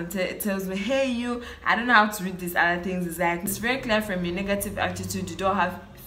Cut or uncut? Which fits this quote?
cut